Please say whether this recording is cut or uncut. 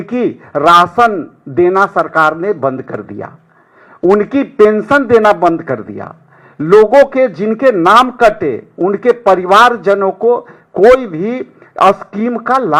uncut